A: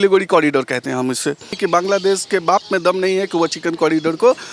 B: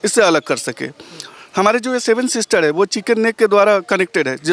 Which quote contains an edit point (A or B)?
A